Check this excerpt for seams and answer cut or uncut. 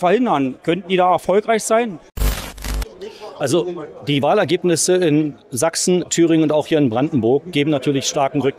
cut